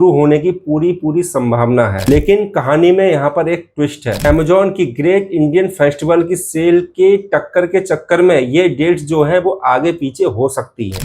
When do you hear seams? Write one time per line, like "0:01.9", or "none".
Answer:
none